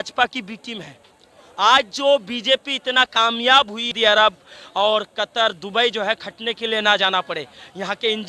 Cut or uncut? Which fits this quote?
cut